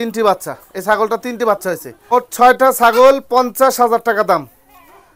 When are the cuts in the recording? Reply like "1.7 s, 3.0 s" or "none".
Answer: 2.1 s